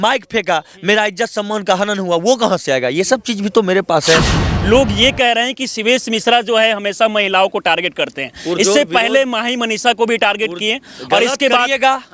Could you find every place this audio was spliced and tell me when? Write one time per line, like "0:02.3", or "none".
0:04.5